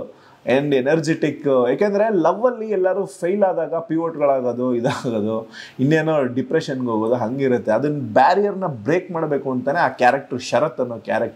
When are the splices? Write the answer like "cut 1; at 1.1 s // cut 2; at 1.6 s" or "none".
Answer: none